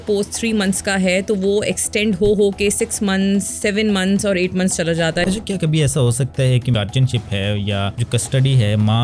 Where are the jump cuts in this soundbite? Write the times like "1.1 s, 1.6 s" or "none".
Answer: 5.2 s, 6.7 s, 8.0 s

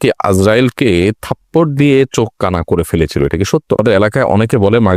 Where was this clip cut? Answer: 3.8 s

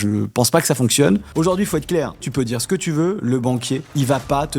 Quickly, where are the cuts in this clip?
1.3 s, 2.3 s, 3.8 s

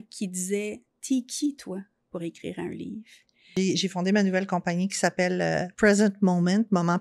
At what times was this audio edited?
3.5 s

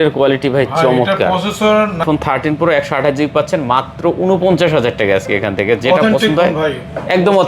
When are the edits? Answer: 2.0 s

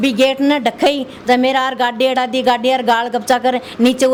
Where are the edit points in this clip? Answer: none

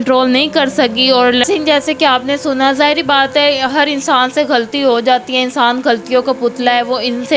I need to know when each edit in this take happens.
1.4 s

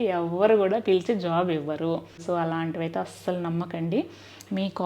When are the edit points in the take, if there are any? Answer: 2.2 s

